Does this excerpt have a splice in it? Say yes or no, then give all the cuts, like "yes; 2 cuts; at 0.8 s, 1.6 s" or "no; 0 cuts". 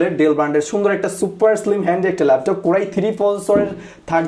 no; 0 cuts